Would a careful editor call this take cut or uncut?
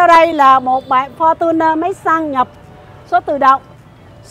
uncut